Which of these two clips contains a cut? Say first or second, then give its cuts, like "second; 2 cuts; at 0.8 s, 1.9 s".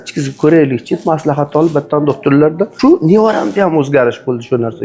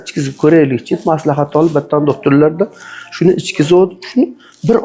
first; 1 cut; at 2.7 s